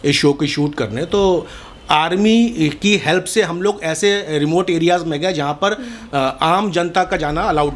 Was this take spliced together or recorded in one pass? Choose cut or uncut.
uncut